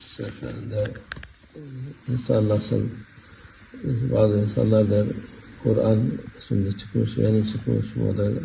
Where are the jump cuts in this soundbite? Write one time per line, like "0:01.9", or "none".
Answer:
none